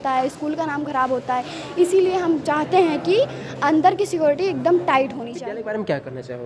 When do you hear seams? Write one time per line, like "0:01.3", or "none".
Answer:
0:05.3